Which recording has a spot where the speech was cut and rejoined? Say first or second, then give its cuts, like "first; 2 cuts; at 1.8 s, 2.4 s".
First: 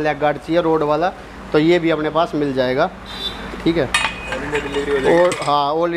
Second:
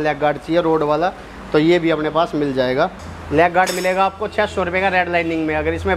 second; 1 cut; at 3.1 s